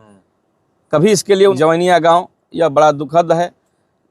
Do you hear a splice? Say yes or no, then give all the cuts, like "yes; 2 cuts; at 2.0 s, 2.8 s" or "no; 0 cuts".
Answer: yes; 1 cut; at 1.5 s